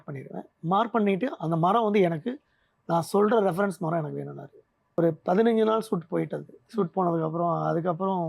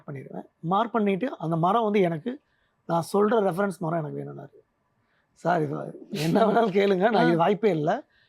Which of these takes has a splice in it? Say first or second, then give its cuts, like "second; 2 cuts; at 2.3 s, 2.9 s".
first; 1 cut; at 5.0 s